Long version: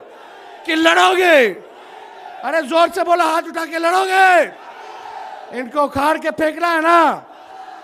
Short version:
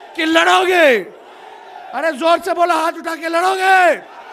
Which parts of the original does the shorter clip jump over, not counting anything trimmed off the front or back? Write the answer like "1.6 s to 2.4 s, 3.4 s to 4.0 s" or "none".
none